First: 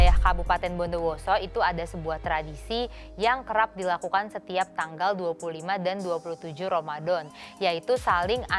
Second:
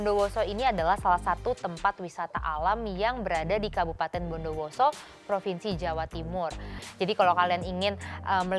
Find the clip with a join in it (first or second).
second